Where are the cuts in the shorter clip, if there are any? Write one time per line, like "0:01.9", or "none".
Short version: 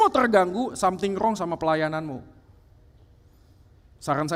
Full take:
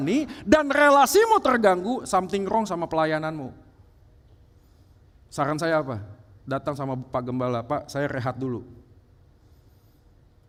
none